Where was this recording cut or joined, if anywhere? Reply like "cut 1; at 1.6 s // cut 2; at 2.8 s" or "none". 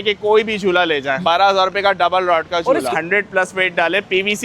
cut 1; at 1.2 s // cut 2; at 2.9 s